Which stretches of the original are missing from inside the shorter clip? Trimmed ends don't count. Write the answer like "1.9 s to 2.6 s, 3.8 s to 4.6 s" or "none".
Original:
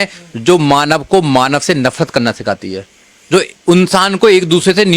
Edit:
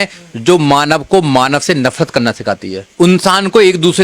2.9 s to 3.5 s

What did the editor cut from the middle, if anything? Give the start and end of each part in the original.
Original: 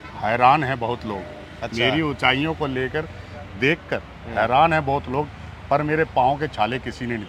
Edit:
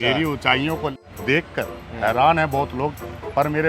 2.7 s to 3.3 s

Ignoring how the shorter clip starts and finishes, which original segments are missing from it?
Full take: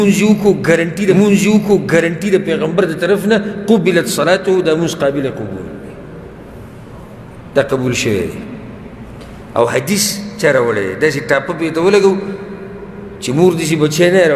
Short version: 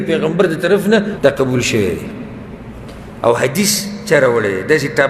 3.5 s to 7.4 s

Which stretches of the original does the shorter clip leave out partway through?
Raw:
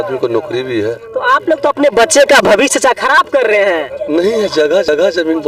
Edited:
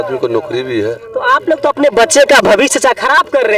none

